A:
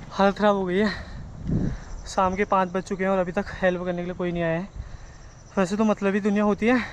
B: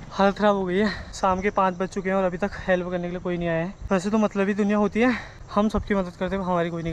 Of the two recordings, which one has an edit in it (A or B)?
B